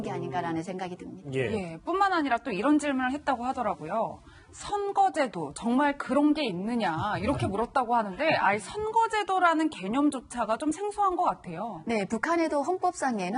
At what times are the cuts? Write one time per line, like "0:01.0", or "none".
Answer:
0:05.3